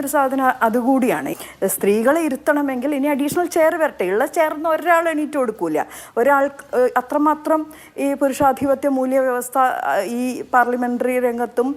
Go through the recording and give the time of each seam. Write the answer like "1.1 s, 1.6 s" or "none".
1.3 s